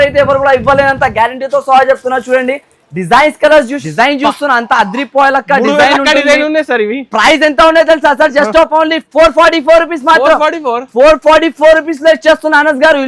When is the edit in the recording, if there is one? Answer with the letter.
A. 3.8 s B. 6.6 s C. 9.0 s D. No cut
A